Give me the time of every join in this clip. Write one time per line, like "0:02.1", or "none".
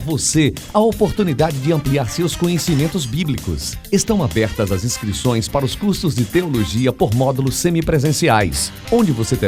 none